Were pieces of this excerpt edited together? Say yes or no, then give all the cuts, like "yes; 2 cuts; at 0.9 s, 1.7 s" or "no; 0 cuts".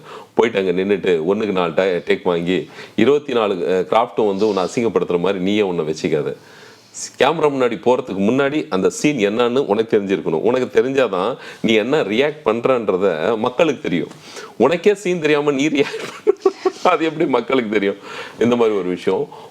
no; 0 cuts